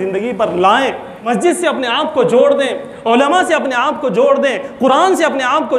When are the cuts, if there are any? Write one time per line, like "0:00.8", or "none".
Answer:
0:01.1